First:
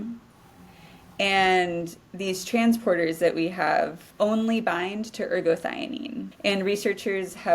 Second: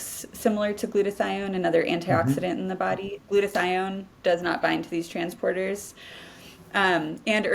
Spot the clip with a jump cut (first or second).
first